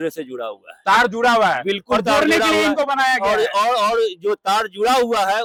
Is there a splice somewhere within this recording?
no; 0 cuts

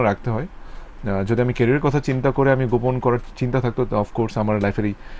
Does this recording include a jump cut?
no; 0 cuts

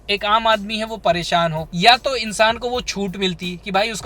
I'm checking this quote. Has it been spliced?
yes; 1 cut; at 1.6 s

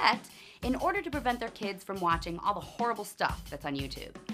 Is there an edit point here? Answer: yes; 1 cut; at 3.4 s

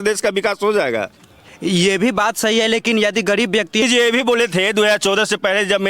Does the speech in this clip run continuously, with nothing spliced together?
no; 1 cut; at 3.8 s

